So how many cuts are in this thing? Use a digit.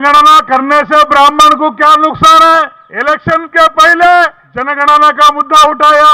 2